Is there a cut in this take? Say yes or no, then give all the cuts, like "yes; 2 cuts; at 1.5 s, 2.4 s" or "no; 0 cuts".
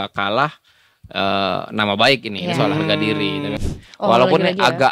yes; 1 cut; at 3.6 s